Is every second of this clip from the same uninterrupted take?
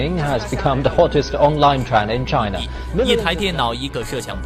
yes; 0 cuts

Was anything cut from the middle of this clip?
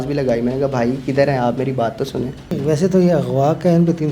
yes; 1 cut; at 2.5 s

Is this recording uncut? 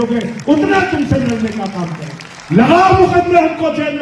no; 1 cut; at 2.4 s

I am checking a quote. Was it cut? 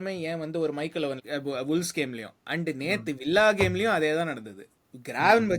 yes; 1 cut; at 1.2 s

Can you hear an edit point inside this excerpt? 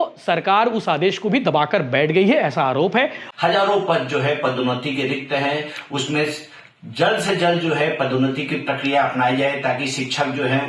yes; 1 cut; at 3.2 s

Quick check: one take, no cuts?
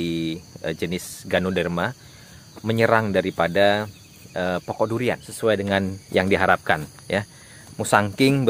no; 1 cut; at 5.3 s

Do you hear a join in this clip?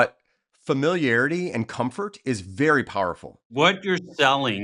yes; 1 cut; at 3.5 s

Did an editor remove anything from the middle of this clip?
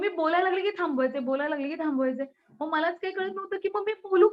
no; 0 cuts

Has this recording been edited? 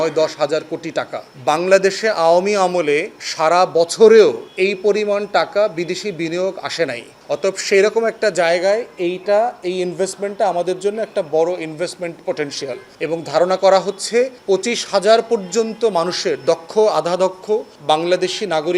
yes; 6 cuts; at 1.2 s, 4.5 s, 7.1 s, 12.9 s, 14.4 s, 17.7 s

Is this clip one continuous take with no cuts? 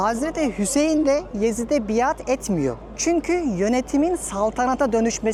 yes; 0 cuts

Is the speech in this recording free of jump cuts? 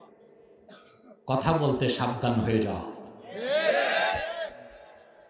yes; 0 cuts

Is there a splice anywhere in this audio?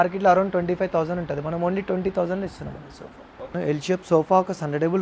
yes; 1 cut; at 3.4 s

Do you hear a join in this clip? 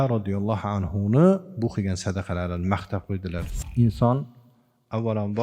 yes; 1 cut; at 3.6 s

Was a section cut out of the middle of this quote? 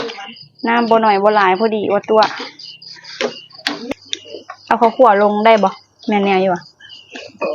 yes; 1 cut; at 3.9 s

